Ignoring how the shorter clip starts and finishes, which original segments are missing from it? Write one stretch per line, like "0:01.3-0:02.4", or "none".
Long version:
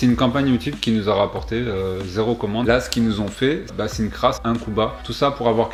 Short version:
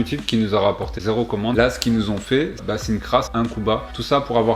0:01.5-0:02.0